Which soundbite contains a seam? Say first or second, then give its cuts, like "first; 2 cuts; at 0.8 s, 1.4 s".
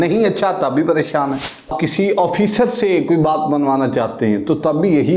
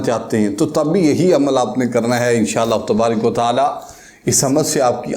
first; 1 cut; at 1.7 s